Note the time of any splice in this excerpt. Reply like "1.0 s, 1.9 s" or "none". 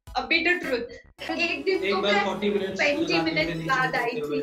1.3 s